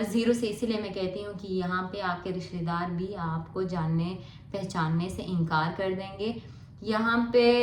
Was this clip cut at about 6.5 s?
no; 0 cuts

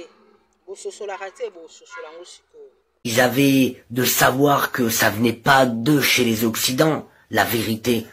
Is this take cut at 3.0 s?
yes; 1 cut; at 3.0 s

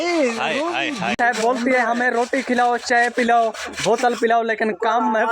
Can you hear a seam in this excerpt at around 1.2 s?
yes; 1 cut; at 1.2 s

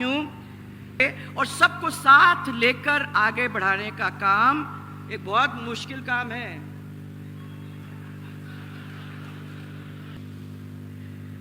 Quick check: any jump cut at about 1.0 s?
yes; 2 cuts; at 1.0 s, 10.3 s

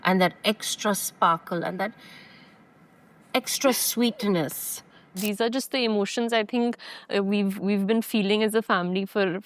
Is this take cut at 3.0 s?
no; 1 cut; at 5.2 s

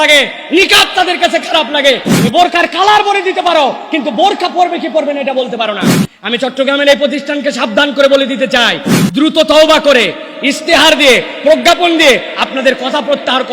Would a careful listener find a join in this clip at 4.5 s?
no; 1 cut; at 2.1 s

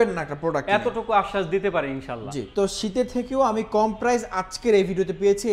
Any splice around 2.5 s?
yes; 1 cut; at 2.5 s

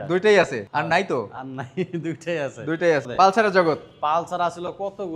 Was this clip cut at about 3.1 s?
yes; 1 cut; at 3.1 s

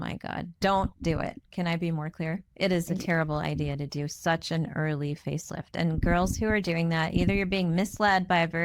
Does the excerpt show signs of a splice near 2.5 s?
no; 0 cuts

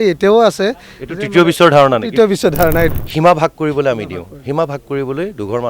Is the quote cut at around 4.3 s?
no; 1 cut; at 2.9 s

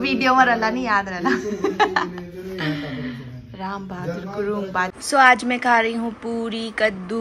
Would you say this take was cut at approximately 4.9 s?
yes; 1 cut; at 4.9 s

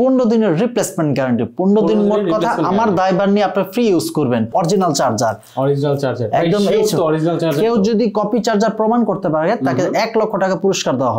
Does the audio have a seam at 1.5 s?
no; 1 cut; at 4.5 s

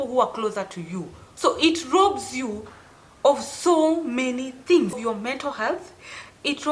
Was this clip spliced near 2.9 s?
no; 2 cuts; at 1.1 s, 5.0 s

